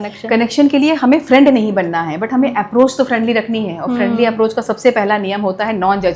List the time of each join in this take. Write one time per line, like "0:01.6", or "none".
none